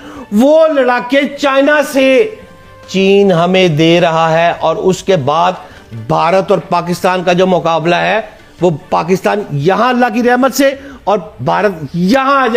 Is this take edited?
no; 0 cuts

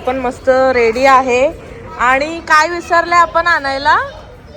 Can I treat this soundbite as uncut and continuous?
yes; 0 cuts

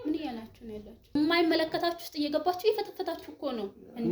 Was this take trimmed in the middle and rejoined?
yes; 1 cut; at 1.1 s

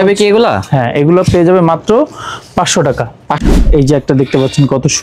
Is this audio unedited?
no; 1 cut; at 3.4 s

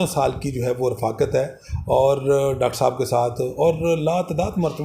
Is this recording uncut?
yes; 0 cuts

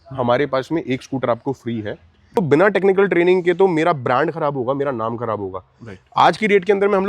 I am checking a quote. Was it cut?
yes; 1 cut; at 2.4 s

